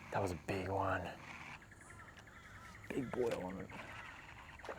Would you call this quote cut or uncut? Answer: cut